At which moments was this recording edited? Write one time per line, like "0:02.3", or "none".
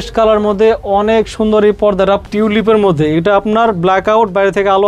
0:02.2